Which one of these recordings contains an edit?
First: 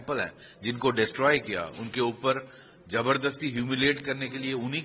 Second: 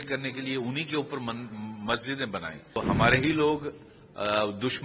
second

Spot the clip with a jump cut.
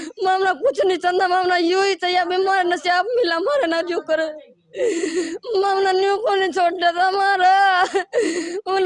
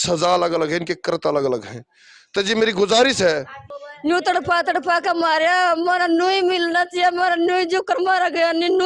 second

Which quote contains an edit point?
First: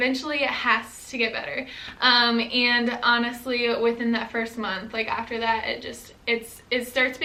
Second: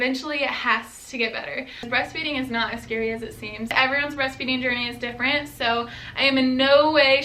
second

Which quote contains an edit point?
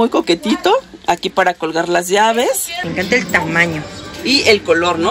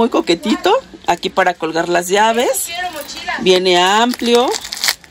first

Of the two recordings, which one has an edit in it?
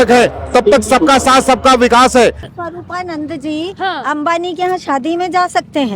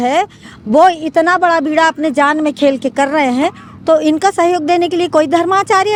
first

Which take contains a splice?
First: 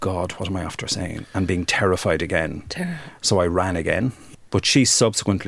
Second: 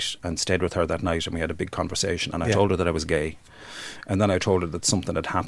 first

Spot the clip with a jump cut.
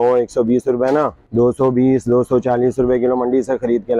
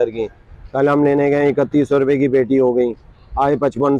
first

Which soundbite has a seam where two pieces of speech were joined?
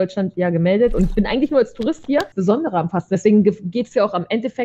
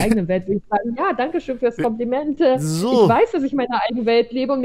first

